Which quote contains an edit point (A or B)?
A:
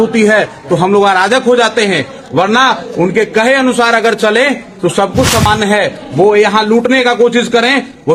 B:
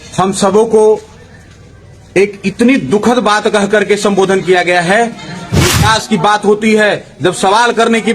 B